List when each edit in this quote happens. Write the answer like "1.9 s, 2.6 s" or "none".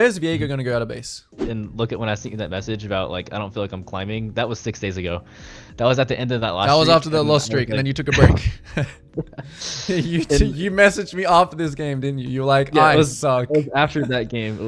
1.4 s